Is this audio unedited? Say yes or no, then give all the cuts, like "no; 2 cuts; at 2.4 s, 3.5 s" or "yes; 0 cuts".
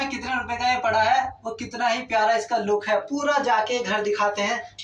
yes; 0 cuts